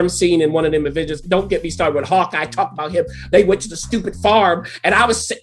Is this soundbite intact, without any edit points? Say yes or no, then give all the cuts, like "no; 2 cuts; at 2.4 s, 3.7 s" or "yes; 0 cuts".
yes; 0 cuts